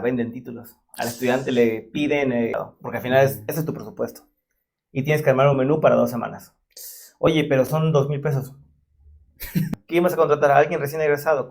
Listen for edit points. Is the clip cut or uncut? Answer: cut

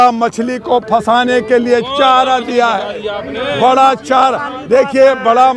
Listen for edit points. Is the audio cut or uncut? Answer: uncut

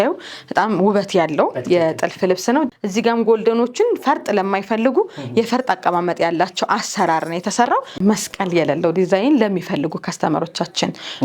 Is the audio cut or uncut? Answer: cut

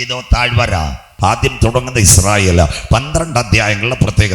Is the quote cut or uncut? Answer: cut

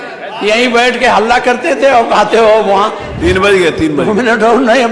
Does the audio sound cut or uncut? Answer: cut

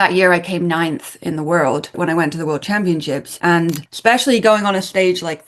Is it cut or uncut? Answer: cut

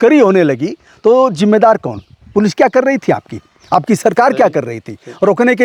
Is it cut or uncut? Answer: uncut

